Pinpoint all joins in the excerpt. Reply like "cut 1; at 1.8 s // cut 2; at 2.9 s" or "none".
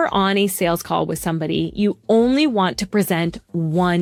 none